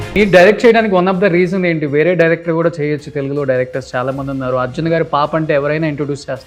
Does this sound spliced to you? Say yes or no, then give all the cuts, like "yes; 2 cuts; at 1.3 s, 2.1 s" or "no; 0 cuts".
no; 0 cuts